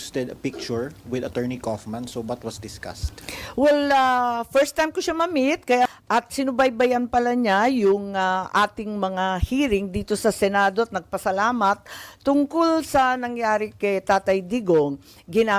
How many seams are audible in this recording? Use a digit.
1